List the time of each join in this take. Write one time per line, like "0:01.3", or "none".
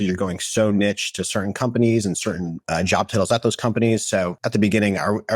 0:02.5
0:04.4